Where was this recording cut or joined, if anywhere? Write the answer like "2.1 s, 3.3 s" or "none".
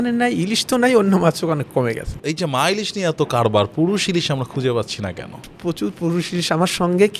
2.3 s, 5.5 s